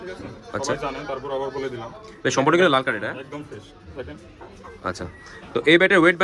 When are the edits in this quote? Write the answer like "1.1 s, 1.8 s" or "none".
3.1 s